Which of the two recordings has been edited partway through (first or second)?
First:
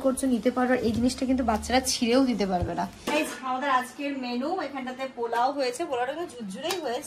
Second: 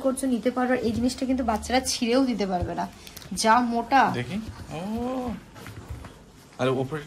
first